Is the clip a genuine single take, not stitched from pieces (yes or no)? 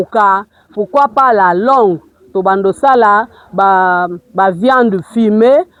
yes